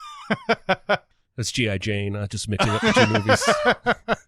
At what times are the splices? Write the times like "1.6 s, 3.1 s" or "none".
1.0 s